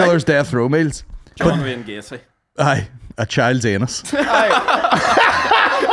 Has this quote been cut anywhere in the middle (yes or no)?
no